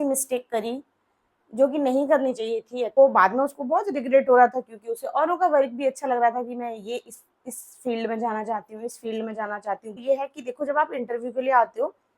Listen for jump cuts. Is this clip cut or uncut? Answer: cut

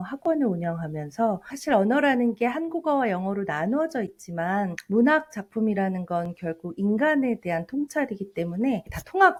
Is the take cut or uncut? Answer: uncut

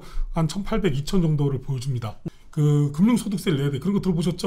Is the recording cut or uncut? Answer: cut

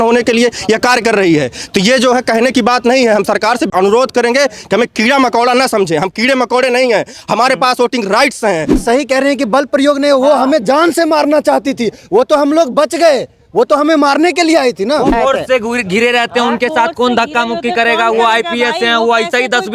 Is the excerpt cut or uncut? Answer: cut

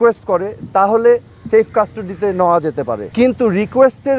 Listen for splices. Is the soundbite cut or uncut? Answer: uncut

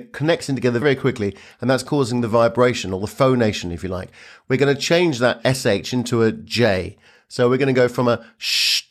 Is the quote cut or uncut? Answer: uncut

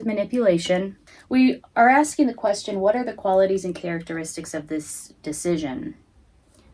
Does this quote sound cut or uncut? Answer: cut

